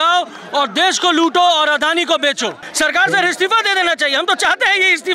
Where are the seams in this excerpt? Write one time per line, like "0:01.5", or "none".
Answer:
0:02.6